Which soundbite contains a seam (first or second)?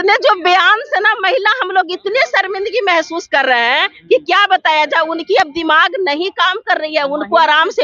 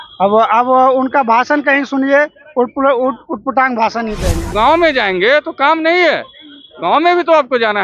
second